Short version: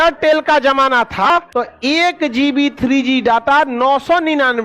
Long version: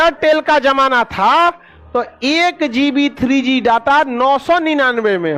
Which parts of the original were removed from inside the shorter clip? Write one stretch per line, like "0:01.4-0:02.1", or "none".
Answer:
0:01.2-0:01.6